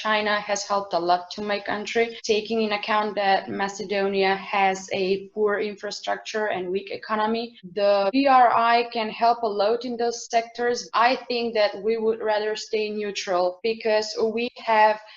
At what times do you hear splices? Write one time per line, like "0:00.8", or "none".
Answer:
0:10.9
0:13.6